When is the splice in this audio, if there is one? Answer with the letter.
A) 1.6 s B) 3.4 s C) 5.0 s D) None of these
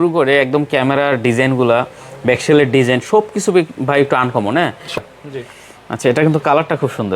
C